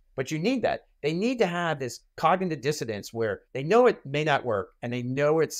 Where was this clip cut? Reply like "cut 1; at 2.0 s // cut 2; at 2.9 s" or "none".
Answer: cut 1; at 3.5 s